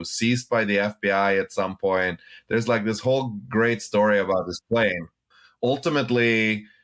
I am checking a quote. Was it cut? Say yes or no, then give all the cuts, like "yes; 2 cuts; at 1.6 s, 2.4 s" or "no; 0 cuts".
yes; 1 cut; at 5.1 s